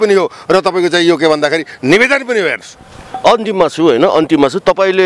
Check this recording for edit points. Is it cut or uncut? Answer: uncut